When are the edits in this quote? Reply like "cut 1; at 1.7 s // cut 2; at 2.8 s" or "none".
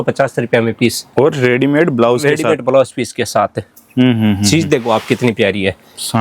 none